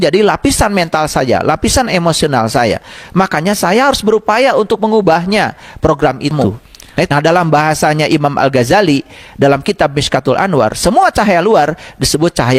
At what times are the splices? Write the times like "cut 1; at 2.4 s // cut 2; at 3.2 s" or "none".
cut 1; at 7.1 s